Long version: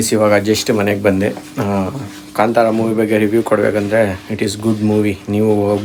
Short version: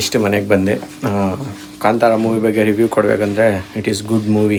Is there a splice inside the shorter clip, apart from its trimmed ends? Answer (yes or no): no